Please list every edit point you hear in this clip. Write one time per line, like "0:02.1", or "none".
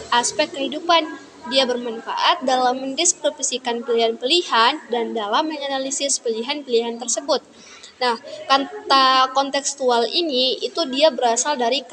none